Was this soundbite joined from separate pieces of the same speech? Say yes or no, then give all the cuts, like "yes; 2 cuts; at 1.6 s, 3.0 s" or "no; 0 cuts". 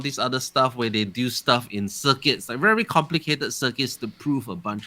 no; 0 cuts